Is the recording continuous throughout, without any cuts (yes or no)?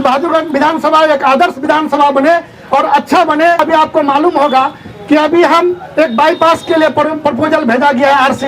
no